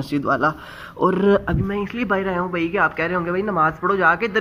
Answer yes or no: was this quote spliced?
no